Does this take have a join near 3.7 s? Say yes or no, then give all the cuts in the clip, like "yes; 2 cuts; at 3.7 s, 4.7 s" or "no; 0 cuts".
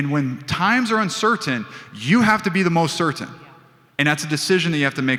no; 0 cuts